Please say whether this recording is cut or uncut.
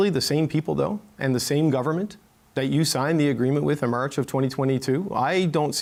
uncut